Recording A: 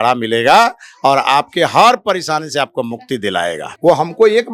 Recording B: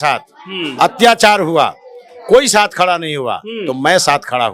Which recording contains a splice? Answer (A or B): A